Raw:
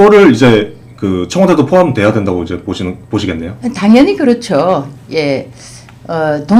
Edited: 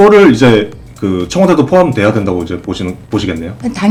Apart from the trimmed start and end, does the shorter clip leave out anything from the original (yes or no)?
no